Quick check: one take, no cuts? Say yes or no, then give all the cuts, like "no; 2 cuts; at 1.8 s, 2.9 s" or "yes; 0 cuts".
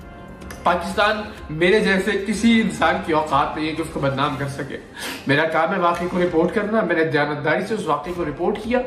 yes; 0 cuts